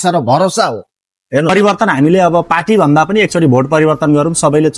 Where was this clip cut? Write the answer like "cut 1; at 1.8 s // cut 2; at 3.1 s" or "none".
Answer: cut 1; at 1.5 s

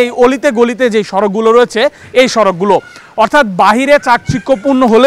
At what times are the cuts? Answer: none

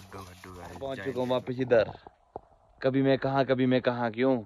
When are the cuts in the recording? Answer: cut 1; at 1.1 s

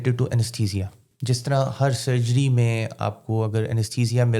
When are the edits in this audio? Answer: cut 1; at 1.1 s

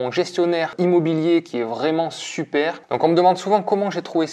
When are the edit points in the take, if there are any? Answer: cut 1; at 2.8 s

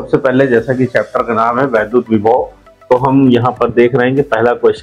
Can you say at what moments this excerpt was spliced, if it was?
none

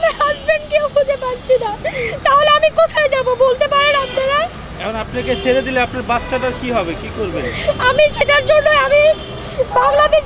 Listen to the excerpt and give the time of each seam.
none

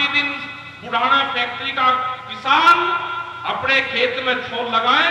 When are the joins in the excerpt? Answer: none

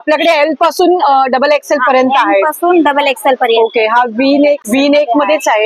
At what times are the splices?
cut 1; at 4.6 s

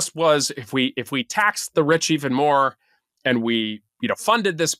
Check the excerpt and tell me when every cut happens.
cut 1; at 3.8 s

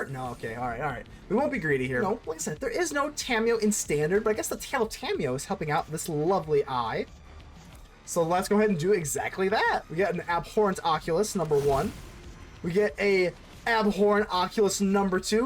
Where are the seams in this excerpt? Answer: cut 1; at 2.0 s

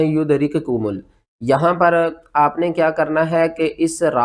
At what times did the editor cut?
none

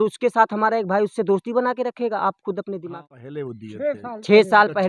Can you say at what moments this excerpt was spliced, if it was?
cut 1; at 2.9 s

